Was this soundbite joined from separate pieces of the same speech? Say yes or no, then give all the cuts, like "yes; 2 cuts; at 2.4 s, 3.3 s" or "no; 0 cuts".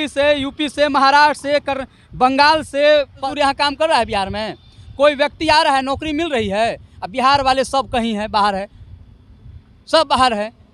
yes; 1 cut; at 3.3 s